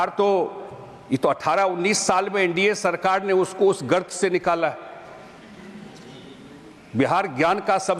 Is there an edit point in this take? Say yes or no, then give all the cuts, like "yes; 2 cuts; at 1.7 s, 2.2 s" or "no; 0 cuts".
no; 0 cuts